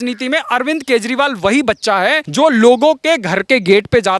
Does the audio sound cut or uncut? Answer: cut